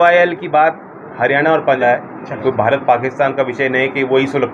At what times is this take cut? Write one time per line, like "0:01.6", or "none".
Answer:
0:01.8

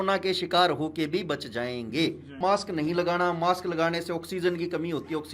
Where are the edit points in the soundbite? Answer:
0:02.4

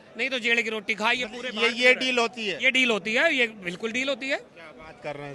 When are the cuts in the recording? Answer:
none

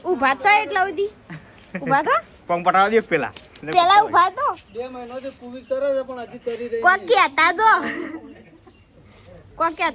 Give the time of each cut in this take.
none

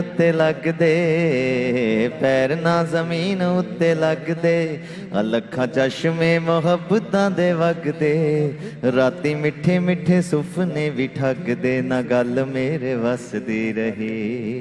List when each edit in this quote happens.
none

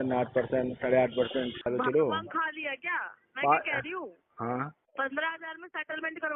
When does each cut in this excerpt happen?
0:01.7
0:04.8

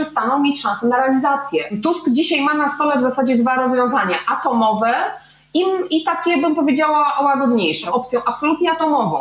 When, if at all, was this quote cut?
0:01.8
0:07.8

